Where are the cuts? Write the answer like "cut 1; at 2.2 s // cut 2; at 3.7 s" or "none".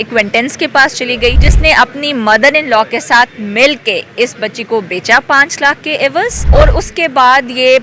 cut 1; at 1.5 s // cut 2; at 6.4 s